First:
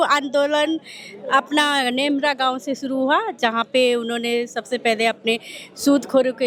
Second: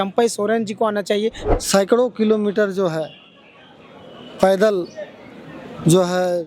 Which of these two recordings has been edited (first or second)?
second